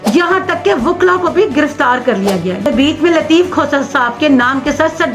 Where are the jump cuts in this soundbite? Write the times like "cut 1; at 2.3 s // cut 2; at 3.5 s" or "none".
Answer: cut 1; at 2.7 s